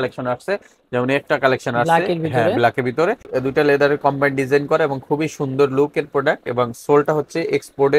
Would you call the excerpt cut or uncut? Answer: cut